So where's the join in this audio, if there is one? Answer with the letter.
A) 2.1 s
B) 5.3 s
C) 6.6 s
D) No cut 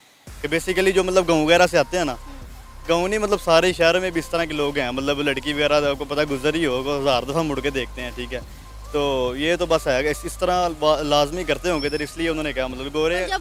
D